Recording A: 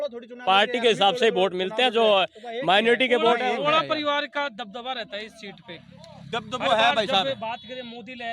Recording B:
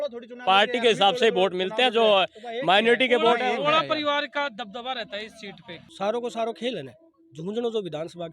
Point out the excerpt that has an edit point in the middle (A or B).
B